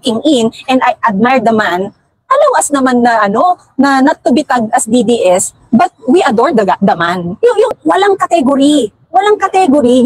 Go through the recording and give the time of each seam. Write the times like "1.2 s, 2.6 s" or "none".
7.7 s